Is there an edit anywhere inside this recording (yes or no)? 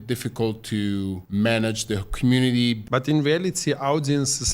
yes